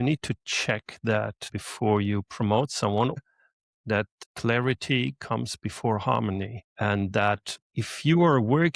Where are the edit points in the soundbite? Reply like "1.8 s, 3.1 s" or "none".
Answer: 1.5 s, 3.2 s